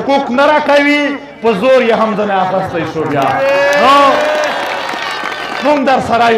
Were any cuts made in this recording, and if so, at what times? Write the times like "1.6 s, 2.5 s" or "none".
5.4 s

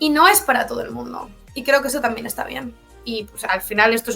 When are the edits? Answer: 2.9 s

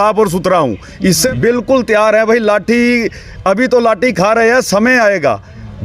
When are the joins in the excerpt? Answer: 1.2 s

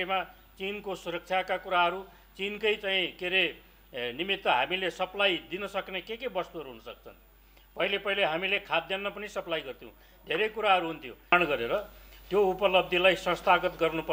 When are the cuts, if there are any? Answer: 11.3 s

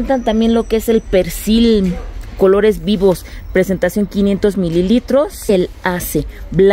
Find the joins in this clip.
5.5 s

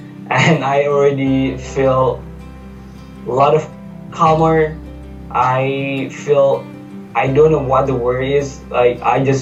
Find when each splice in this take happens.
none

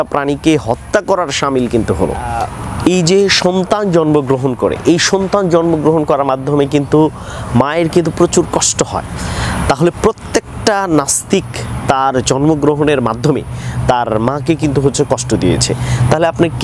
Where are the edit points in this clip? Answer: 2.4 s

